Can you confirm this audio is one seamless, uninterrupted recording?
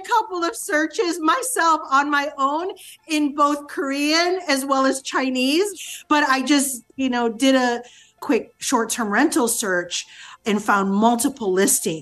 yes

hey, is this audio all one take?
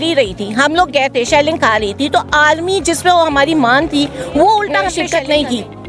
no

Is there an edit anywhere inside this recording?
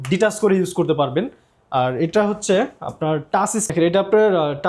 no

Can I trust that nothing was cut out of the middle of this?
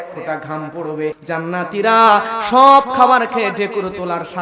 no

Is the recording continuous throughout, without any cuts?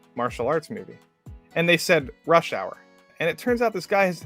no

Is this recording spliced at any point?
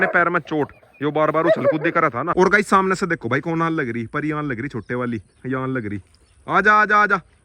yes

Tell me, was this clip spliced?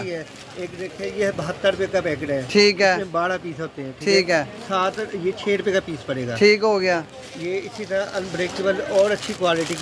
no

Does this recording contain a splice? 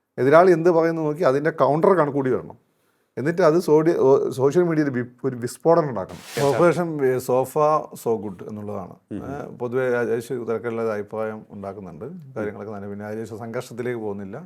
yes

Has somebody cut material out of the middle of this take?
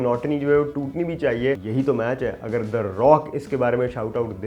yes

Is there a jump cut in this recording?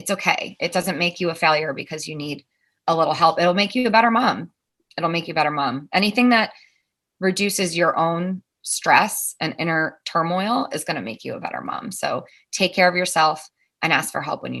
no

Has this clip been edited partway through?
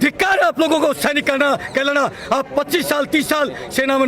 no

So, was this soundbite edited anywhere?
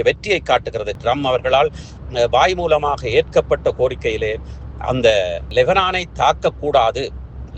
yes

